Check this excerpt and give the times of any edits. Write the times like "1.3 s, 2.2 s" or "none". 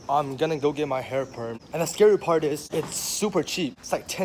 none